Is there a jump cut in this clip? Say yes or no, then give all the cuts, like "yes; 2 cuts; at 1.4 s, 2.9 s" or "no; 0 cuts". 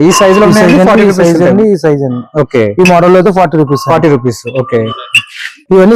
no; 0 cuts